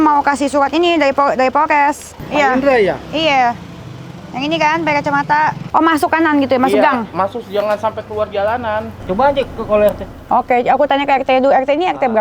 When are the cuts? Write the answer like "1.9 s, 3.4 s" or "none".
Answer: 2.1 s, 5.6 s, 8.9 s